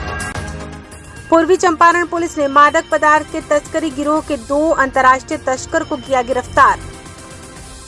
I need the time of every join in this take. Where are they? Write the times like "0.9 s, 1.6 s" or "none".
0.9 s

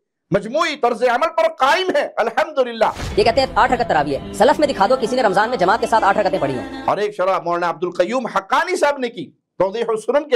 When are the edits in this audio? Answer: 3.0 s, 6.7 s

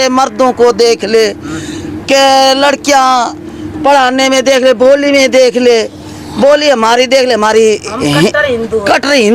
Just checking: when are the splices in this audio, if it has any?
none

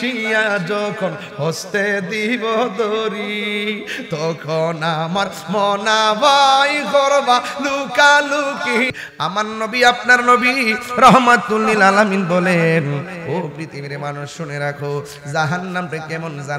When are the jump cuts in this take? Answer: 8.9 s

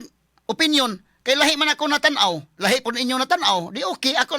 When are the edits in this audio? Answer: 2.5 s

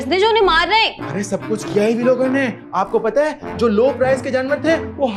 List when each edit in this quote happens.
none

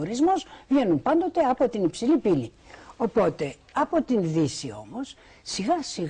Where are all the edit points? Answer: 5.2 s

